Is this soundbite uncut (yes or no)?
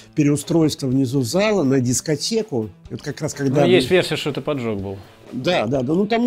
yes